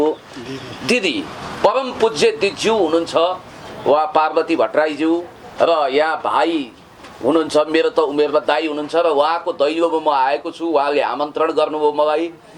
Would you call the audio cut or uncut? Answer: uncut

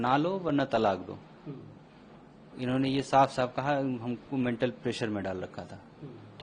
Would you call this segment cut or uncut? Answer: uncut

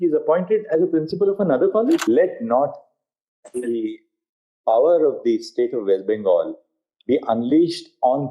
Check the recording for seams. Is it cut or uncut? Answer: cut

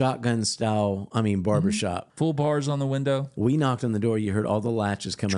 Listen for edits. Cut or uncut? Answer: cut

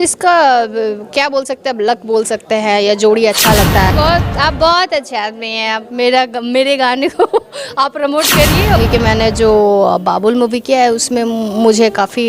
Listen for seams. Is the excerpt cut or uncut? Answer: cut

